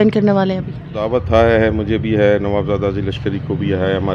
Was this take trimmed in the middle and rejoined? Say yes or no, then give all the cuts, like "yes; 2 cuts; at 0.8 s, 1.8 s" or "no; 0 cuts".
yes; 1 cut; at 0.9 s